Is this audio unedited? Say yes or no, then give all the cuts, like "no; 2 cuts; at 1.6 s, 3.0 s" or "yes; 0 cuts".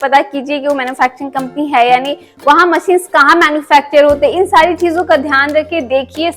yes; 0 cuts